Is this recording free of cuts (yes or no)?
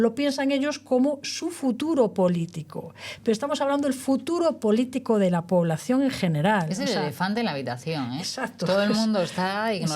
yes